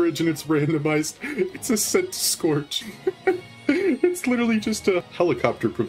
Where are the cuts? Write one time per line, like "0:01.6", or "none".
0:02.8
0:05.1